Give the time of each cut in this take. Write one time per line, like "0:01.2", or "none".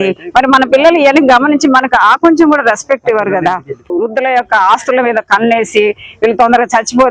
0:04.1